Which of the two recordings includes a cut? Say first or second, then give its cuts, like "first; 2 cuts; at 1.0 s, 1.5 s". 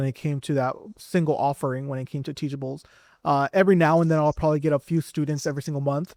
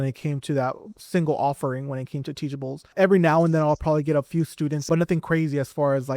second; 2 cuts; at 2.9 s, 4.8 s